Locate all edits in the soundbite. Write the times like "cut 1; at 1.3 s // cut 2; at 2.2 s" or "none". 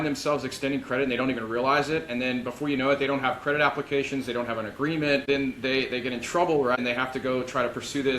cut 1; at 5.2 s // cut 2; at 6.8 s

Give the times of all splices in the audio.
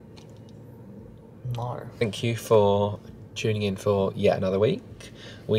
none

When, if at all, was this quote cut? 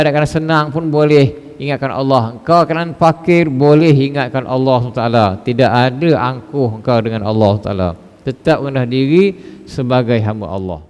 none

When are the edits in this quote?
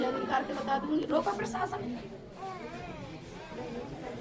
none

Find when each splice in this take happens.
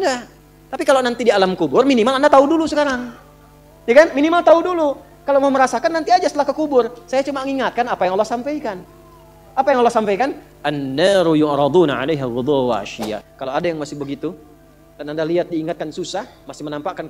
cut 1; at 13.3 s

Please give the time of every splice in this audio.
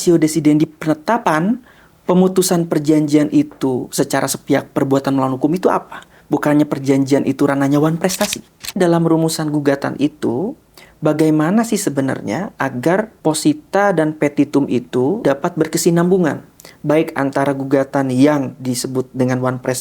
cut 1; at 1.2 s // cut 2; at 8.8 s // cut 3; at 13.1 s // cut 4; at 15.2 s

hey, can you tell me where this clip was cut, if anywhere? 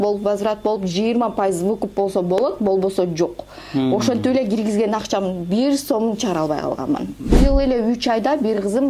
cut 1; at 7.3 s

